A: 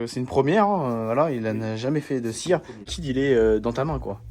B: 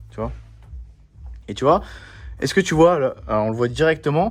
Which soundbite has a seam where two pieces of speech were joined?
A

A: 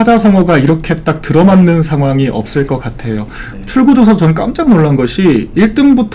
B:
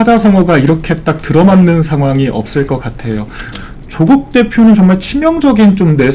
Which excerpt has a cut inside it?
B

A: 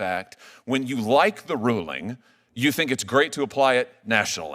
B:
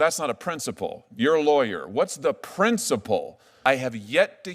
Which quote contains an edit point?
B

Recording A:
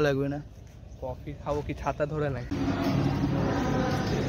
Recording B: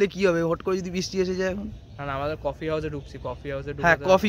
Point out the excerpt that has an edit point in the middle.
A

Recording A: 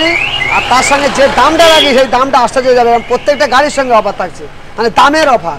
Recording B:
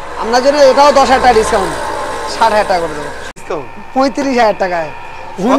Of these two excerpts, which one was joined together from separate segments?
B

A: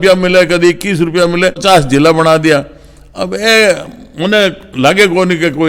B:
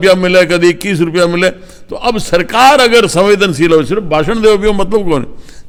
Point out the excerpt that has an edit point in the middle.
A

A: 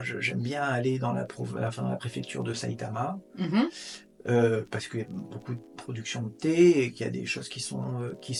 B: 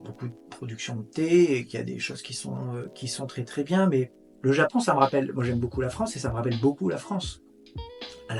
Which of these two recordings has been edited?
B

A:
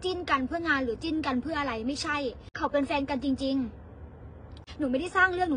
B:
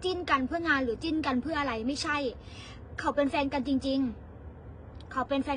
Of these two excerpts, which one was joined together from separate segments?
A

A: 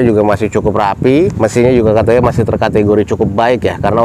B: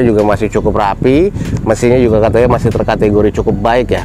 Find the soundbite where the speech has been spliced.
A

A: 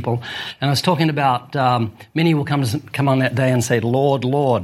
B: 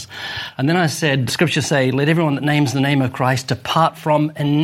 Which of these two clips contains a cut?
B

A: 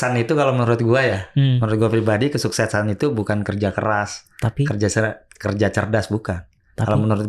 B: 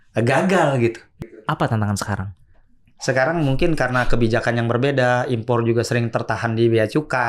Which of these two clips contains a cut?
B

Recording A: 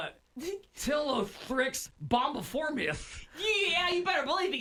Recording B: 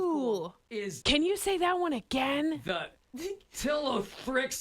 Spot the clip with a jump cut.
B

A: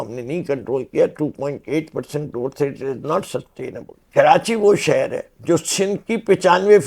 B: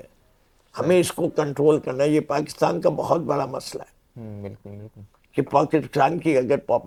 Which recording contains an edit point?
A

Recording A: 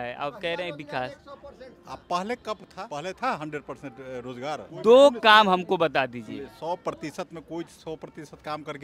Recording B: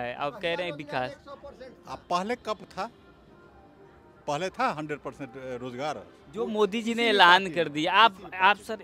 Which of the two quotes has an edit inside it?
A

